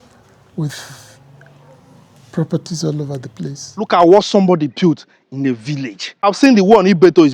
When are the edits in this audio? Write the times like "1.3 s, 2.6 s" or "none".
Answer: 3.9 s, 6.2 s